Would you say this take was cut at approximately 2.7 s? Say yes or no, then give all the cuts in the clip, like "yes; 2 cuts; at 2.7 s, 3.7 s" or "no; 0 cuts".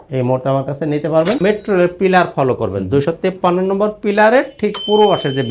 no; 1 cut; at 1.4 s